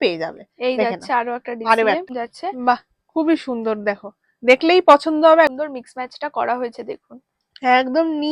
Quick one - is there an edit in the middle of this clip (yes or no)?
yes